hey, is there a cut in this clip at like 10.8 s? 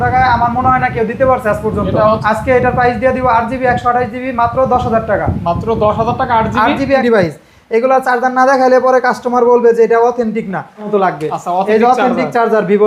yes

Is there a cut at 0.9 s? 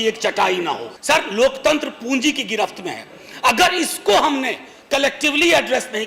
yes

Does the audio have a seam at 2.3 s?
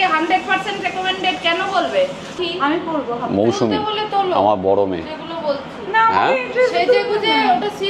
yes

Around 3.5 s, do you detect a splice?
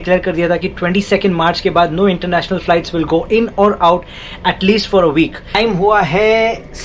no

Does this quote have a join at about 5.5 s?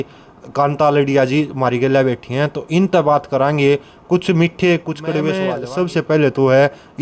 yes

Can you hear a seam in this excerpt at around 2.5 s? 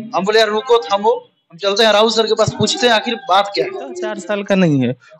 no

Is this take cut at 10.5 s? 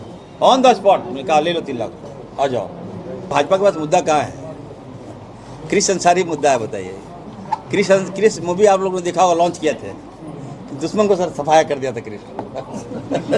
no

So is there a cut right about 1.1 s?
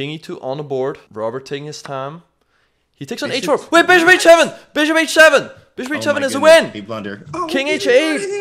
yes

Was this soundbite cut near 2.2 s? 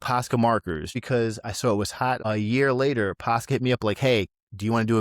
yes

